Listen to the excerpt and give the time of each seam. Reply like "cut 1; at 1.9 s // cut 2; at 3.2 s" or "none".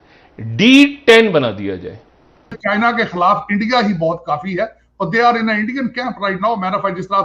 cut 1; at 2.6 s